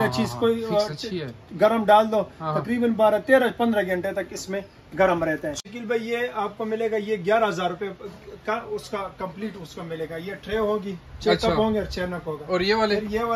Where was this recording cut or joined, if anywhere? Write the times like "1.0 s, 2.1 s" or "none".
5.6 s